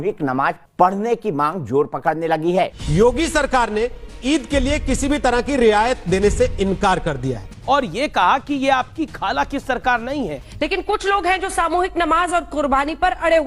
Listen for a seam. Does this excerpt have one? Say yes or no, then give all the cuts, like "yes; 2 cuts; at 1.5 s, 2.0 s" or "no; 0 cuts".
no; 0 cuts